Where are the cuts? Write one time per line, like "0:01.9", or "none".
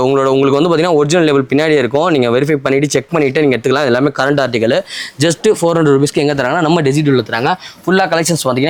none

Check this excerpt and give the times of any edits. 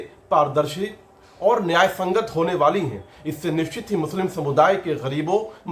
none

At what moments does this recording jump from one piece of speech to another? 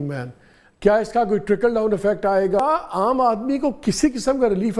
0:02.6

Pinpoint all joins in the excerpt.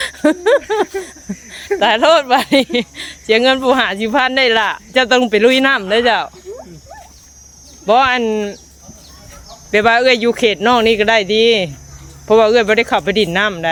none

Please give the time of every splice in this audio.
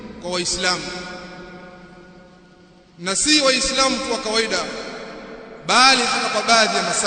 none

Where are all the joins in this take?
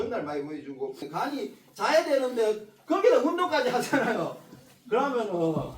0:01.0

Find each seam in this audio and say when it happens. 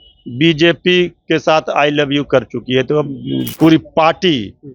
0:03.5

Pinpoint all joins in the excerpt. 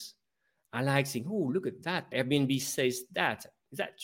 0:02.1

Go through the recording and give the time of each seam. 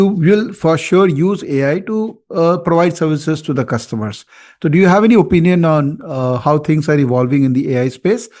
none

